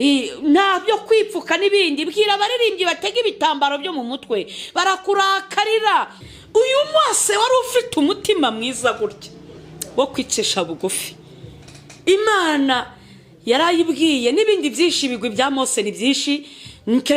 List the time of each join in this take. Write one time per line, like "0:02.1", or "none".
none